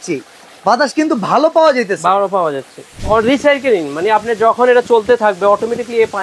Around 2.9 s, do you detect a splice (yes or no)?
yes